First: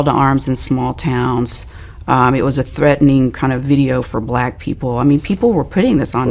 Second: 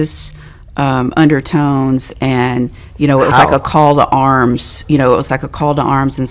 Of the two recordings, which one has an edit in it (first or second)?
second